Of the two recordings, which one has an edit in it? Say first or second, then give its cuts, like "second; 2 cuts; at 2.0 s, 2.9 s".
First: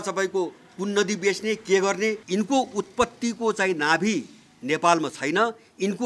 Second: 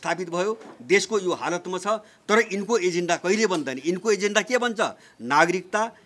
first; 1 cut; at 2.2 s